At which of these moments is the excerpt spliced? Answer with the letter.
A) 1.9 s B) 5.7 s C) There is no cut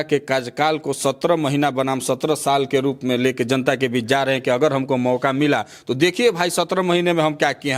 C